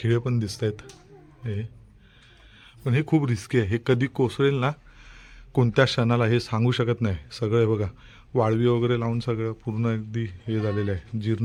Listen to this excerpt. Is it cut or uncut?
uncut